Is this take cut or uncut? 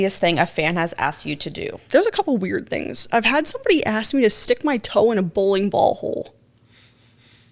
cut